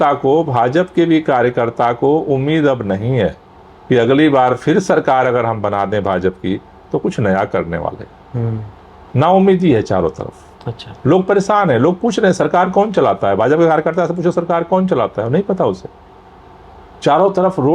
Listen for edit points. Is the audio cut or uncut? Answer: uncut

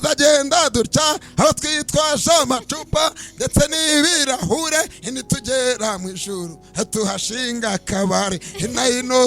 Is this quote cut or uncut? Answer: uncut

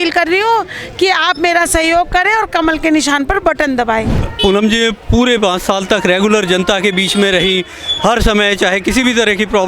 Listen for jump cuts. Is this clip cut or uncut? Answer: cut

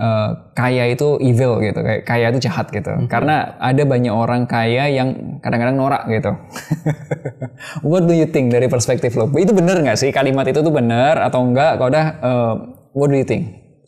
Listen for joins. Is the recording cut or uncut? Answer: uncut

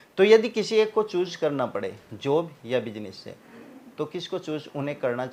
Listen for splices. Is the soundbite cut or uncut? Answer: uncut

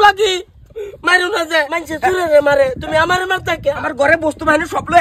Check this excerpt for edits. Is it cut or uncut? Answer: cut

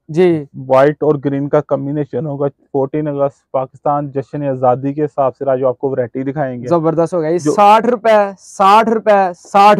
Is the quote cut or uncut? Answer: uncut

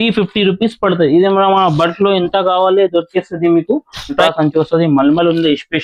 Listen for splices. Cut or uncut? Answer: cut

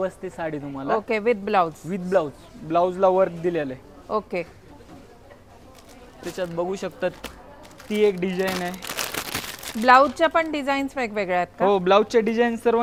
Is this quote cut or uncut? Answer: uncut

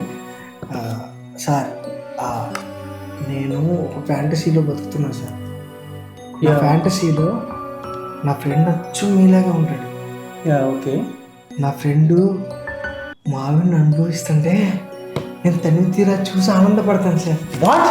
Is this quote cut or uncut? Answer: uncut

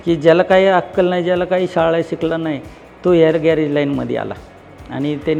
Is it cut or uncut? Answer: uncut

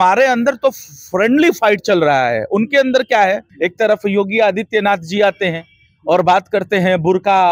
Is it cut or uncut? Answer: cut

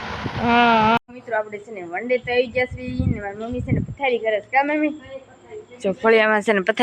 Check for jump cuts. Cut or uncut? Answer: cut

